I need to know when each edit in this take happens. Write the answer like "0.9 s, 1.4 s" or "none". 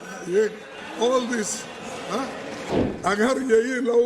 2.7 s